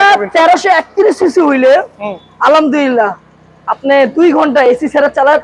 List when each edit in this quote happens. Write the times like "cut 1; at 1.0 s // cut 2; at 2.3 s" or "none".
none